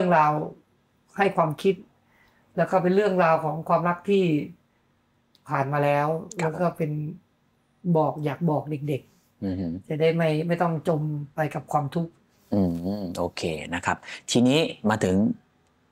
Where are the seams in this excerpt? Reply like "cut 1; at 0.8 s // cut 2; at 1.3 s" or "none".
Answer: none